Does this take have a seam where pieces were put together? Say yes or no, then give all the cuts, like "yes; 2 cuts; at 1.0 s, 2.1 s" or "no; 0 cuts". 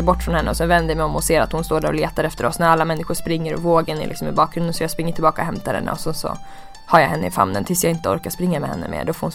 no; 0 cuts